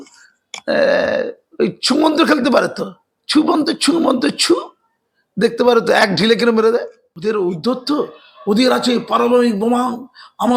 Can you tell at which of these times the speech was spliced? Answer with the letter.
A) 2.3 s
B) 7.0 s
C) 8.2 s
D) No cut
B